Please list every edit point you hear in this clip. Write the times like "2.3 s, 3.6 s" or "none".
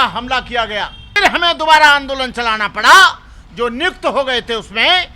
1.2 s